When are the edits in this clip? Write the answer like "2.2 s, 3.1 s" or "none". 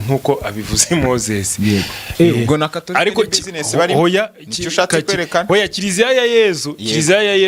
none